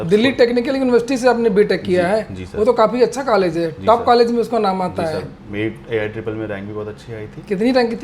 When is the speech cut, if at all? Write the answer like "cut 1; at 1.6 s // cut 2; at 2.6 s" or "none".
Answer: none